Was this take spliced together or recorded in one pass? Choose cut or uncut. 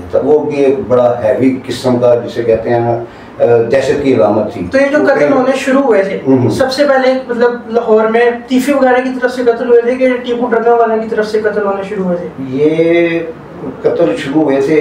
uncut